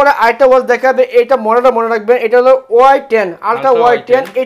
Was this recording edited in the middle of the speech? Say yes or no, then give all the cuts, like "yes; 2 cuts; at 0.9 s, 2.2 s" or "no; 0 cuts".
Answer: no; 0 cuts